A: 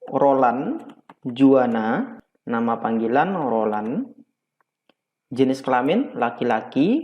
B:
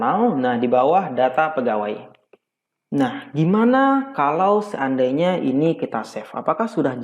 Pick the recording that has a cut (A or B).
A